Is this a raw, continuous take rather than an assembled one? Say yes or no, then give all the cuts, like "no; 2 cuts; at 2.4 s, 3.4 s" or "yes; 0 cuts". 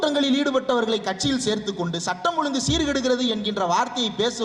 yes; 0 cuts